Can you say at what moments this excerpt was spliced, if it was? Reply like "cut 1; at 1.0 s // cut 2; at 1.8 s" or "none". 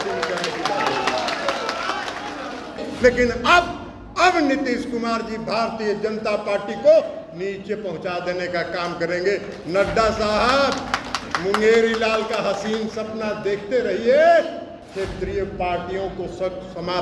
cut 1; at 2.9 s